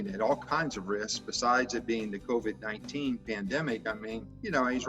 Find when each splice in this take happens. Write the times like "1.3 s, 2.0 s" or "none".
3.9 s